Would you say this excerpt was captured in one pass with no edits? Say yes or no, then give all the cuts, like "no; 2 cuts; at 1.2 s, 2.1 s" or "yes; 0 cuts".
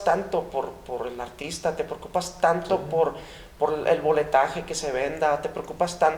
yes; 0 cuts